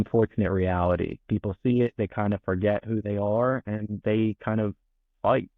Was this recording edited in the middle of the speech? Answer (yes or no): no